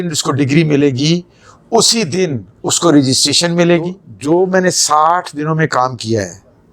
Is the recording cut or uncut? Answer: cut